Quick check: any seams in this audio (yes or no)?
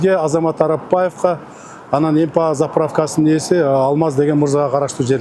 no